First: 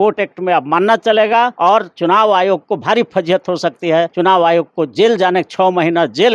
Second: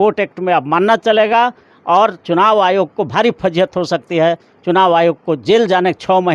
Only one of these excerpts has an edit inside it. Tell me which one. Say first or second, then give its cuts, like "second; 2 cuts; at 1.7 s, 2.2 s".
first; 2 cuts; at 1.5 s, 4.1 s